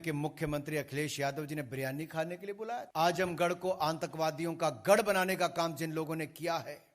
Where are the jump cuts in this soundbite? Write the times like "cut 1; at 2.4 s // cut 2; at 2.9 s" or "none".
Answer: cut 1; at 2.9 s